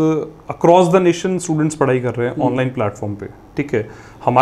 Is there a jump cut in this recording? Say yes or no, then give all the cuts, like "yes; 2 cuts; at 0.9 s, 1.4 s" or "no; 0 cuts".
no; 0 cuts